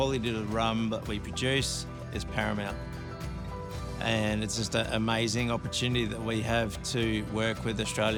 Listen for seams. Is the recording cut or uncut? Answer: uncut